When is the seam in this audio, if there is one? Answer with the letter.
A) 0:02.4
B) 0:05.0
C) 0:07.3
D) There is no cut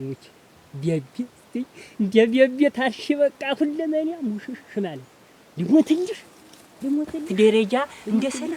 C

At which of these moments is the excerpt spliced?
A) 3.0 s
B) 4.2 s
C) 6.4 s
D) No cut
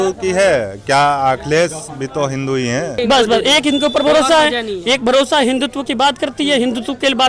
A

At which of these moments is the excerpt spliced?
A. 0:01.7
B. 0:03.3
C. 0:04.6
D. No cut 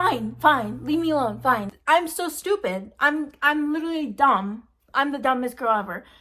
A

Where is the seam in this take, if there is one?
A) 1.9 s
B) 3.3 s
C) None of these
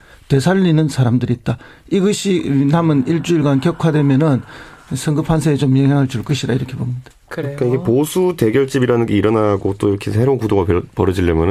B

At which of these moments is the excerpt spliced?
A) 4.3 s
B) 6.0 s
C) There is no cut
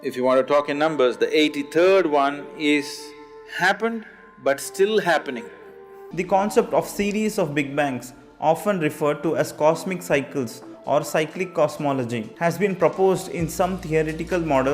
B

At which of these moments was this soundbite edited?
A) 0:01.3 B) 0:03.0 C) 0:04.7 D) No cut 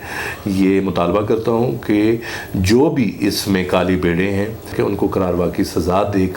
C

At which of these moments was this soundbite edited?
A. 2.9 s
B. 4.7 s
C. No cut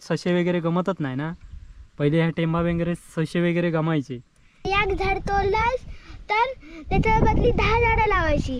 B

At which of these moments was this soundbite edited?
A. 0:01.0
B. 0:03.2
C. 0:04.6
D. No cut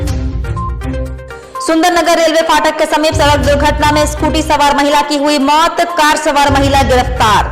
A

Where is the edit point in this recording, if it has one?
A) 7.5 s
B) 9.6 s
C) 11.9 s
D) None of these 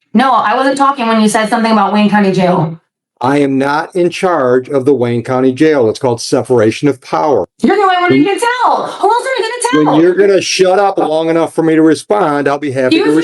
A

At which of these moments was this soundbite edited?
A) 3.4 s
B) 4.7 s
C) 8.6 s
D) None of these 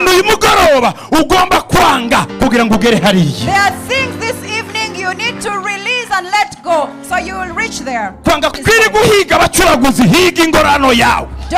C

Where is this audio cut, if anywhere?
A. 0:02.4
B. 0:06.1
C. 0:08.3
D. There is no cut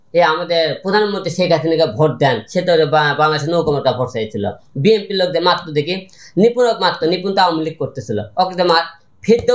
D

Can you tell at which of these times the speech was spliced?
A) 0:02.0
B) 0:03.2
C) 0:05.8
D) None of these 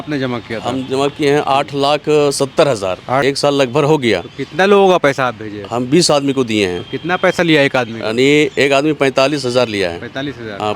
B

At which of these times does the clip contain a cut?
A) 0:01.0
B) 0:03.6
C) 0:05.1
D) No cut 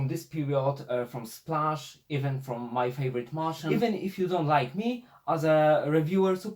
B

